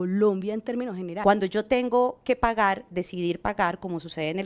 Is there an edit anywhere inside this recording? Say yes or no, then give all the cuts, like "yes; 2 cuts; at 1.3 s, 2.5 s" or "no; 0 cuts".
yes; 1 cut; at 1.1 s